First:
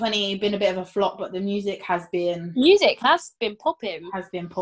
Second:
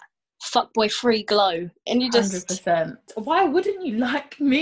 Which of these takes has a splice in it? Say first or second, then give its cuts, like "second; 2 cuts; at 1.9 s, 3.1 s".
second; 1 cut; at 3.1 s